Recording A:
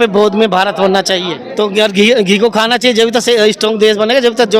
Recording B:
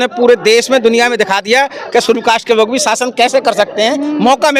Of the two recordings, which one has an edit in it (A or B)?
A